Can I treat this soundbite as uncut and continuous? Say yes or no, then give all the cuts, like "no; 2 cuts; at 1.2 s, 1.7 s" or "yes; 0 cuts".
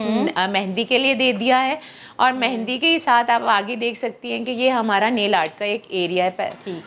yes; 0 cuts